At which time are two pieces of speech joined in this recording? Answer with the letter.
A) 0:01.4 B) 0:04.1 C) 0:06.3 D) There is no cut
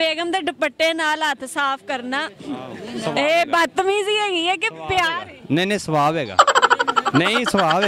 D